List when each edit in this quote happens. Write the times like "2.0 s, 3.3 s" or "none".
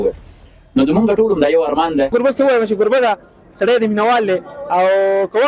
2.1 s